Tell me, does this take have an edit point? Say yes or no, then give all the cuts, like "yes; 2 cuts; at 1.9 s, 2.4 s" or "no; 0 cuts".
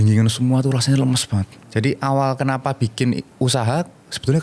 yes; 1 cut; at 1.6 s